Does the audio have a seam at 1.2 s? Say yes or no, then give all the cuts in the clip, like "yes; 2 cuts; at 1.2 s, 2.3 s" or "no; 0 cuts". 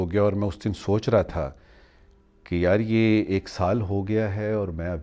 no; 0 cuts